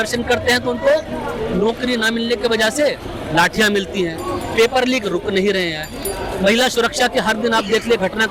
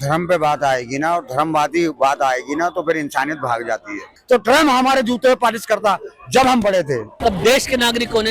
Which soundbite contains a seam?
second; 2 cuts; at 4.1 s, 7.1 s

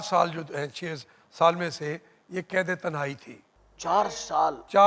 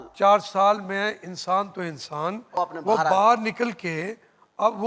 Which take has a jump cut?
second; 1 cut; at 2.5 s

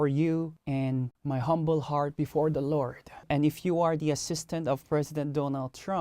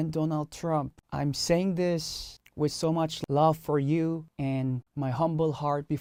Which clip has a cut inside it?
first; 1 cut; at 3.2 s

